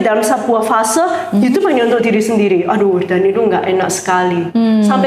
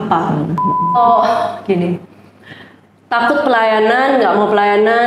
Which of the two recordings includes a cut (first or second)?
second